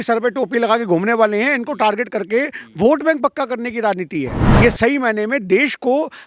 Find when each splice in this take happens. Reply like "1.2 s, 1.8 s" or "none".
4.4 s

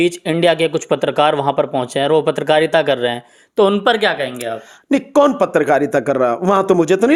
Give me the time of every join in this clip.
none

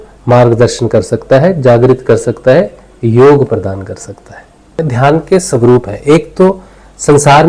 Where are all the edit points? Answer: 4.8 s

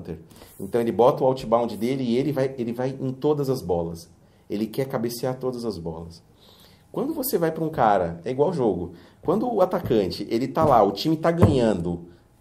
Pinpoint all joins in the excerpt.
none

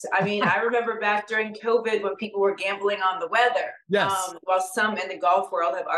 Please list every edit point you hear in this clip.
4.1 s

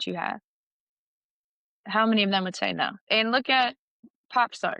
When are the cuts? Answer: 3.0 s, 4.0 s

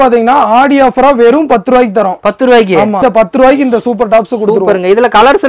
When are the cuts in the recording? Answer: 3.0 s

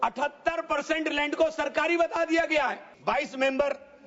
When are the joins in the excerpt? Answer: 2.9 s

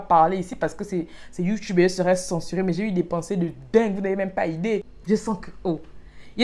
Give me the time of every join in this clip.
4.9 s

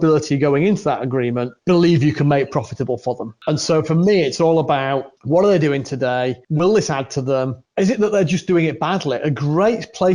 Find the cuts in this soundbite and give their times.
1.5 s, 3.3 s, 5.1 s, 6.4 s, 7.6 s

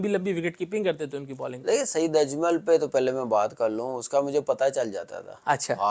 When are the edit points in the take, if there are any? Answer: none

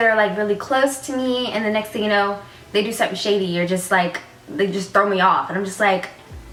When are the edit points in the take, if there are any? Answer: none

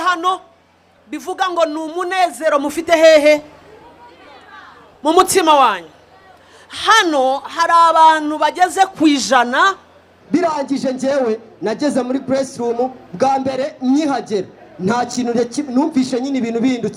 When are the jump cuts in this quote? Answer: 10.1 s

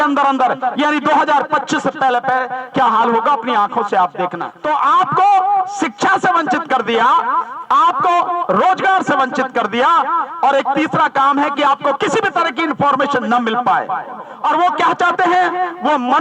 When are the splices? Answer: 4.5 s, 14.3 s

